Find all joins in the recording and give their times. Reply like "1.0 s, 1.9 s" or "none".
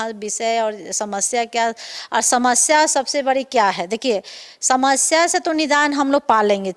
none